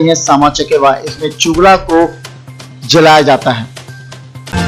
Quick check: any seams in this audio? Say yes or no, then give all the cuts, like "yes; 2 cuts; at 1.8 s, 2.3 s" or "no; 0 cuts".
no; 0 cuts